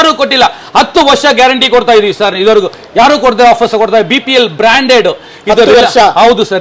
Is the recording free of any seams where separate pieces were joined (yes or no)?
yes